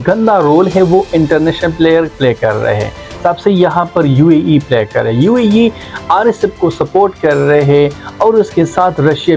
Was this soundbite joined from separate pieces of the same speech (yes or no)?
no